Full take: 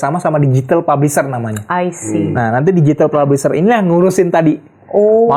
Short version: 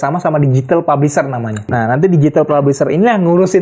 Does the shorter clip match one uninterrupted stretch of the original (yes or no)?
no